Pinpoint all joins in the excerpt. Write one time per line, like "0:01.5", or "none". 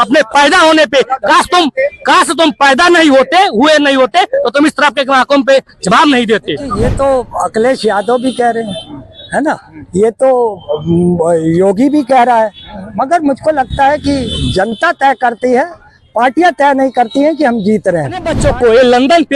0:06.8
0:18.3